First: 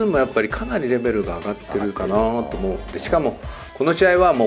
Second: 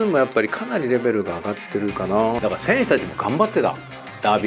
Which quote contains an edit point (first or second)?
second